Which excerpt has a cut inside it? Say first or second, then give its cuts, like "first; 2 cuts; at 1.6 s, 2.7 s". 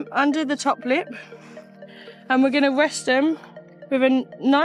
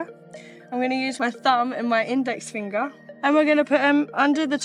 second; 2 cuts; at 1.1 s, 3.0 s